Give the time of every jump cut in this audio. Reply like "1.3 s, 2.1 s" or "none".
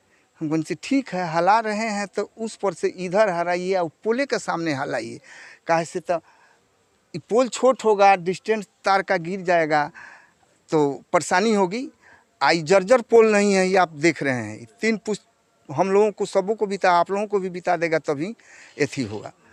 none